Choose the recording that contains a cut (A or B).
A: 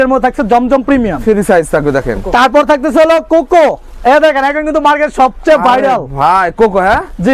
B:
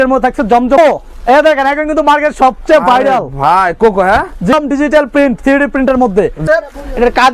B